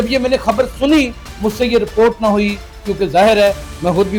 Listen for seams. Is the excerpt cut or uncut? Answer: uncut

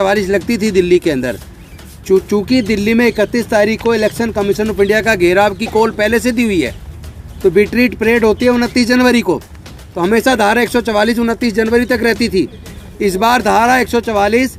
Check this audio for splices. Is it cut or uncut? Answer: uncut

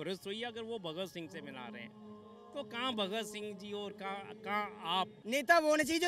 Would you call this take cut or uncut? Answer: cut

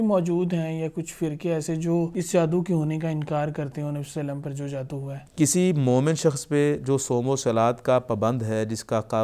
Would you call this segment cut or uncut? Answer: cut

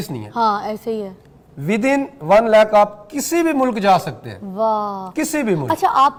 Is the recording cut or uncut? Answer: uncut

